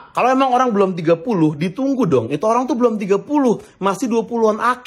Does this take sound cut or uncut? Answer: uncut